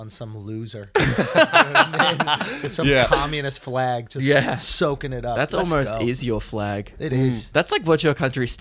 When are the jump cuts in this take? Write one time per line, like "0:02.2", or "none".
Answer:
none